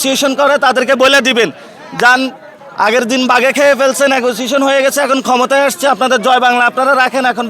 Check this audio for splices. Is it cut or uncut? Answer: uncut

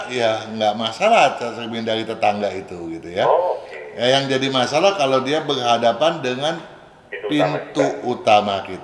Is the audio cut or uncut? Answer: uncut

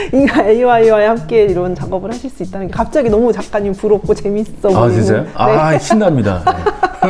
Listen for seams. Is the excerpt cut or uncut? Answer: uncut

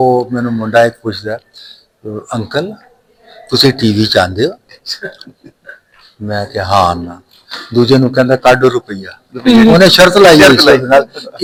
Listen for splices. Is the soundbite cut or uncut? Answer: uncut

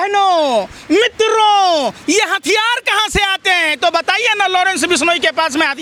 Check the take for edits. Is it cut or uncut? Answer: uncut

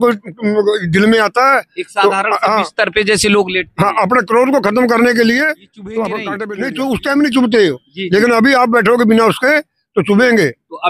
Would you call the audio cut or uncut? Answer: cut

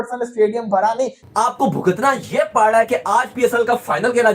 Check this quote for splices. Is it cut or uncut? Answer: cut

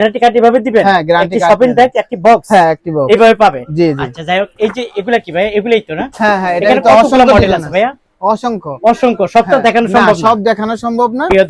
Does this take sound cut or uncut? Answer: uncut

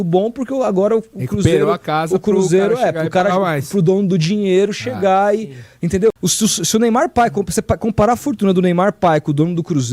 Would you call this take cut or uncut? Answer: cut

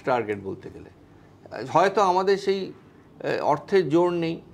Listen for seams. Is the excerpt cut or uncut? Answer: uncut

